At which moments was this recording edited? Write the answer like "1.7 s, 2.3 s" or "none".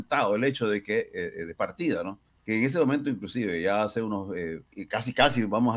2.3 s, 4.7 s